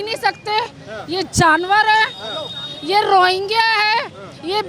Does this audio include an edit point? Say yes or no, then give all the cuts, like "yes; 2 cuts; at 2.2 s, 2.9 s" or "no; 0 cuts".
no; 0 cuts